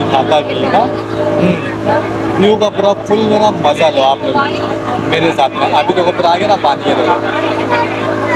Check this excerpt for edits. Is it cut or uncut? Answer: uncut